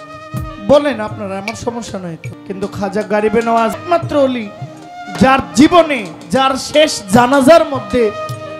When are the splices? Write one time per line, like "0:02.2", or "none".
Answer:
0:02.3
0:03.7